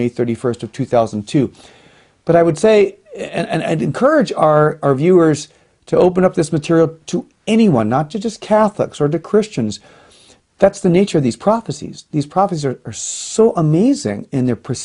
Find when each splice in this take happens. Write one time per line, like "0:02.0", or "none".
none